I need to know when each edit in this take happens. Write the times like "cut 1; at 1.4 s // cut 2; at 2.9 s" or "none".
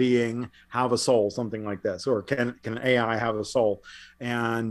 none